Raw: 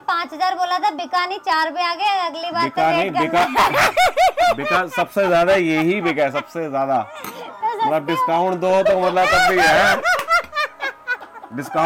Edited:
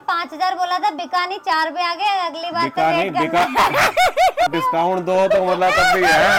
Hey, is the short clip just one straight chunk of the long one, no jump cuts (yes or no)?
no